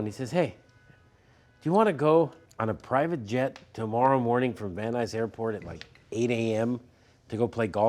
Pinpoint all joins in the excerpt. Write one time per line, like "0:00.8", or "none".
0:02.4